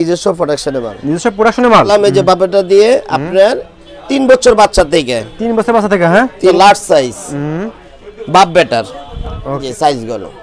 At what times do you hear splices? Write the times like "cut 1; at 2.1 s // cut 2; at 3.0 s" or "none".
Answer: cut 1; at 1.9 s // cut 2; at 6.6 s // cut 3; at 9.6 s